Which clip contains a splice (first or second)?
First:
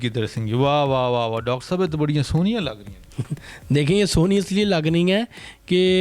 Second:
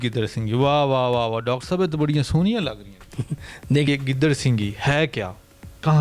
second